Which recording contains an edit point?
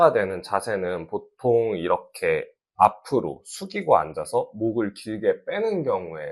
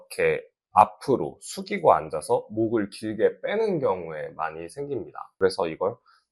second; 1 cut; at 5.2 s

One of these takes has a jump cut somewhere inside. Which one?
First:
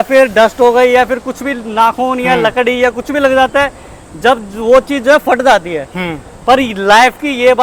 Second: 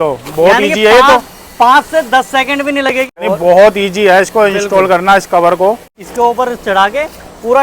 second; 2 cuts; at 3.2 s, 5.9 s

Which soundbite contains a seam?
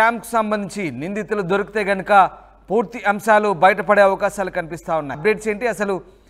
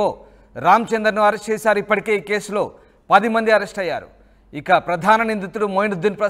first; 1 cut; at 5.2 s

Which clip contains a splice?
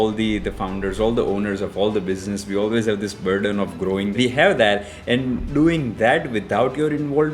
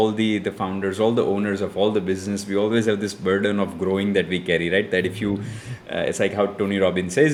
first; 1 cut; at 4.1 s

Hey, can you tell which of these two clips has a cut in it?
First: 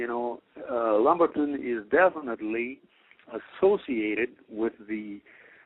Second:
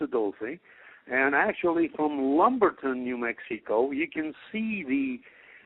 second; 1 cut; at 2.4 s

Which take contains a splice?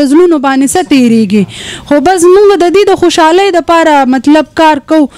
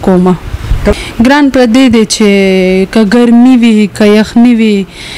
second; 1 cut; at 0.9 s

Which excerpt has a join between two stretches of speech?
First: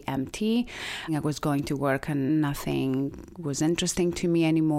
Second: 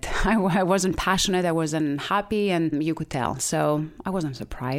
first; 2 cuts; at 1.1 s, 2.3 s

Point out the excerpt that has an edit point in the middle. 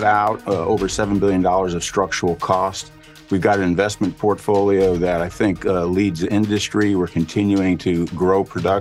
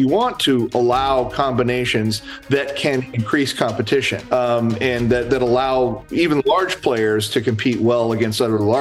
second; 1 cut; at 4.2 s

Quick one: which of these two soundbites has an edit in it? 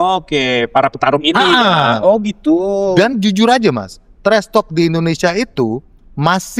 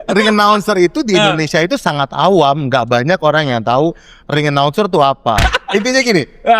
second; 1 cut; at 5.5 s

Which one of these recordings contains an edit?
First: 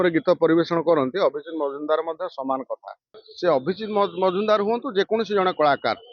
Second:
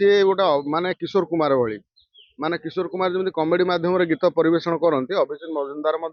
first; 1 cut; at 3.2 s

